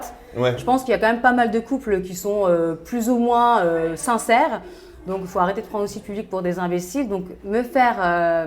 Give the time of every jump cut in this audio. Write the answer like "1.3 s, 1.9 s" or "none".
none